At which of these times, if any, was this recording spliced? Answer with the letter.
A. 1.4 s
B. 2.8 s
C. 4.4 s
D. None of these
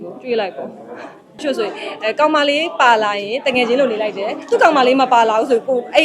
A